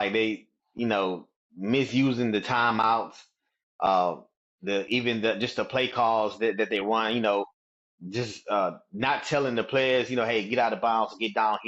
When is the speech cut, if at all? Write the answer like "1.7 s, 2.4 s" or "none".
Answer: none